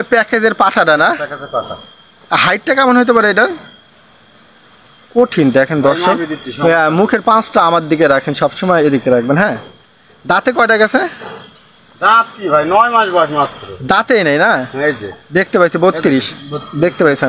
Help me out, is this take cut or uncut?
uncut